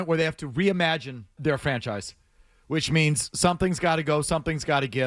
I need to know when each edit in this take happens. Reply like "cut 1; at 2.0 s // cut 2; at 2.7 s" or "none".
cut 1; at 1.4 s